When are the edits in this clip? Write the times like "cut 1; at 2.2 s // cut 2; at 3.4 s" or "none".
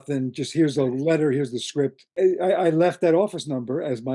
cut 1; at 2.0 s

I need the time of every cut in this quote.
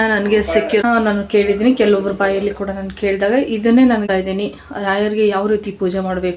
cut 1; at 0.8 s // cut 2; at 4.0 s

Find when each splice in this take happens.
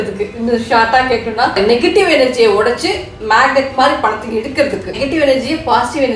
cut 1; at 1.5 s // cut 2; at 5.0 s

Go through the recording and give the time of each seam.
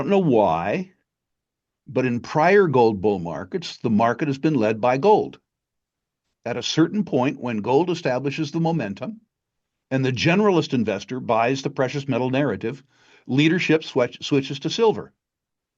none

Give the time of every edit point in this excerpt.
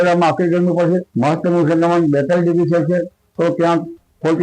cut 1; at 1.1 s

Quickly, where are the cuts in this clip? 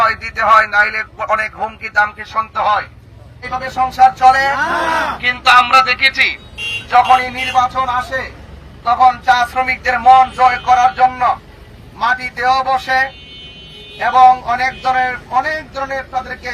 cut 1; at 3.4 s

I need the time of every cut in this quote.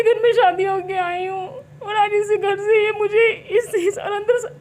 none

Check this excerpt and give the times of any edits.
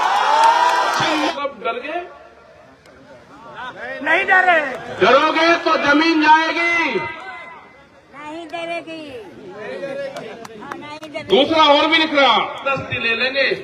cut 1; at 1.3 s // cut 2; at 12.6 s

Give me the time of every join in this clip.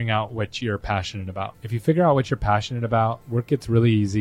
cut 1; at 1.7 s // cut 2; at 3.2 s

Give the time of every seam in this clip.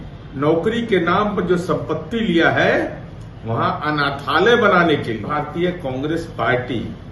cut 1; at 5.3 s

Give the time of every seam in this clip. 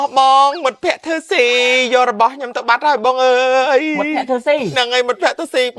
none

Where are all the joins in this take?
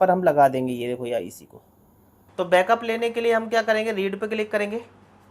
cut 1; at 1.7 s

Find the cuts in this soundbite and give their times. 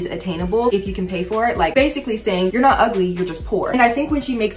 none

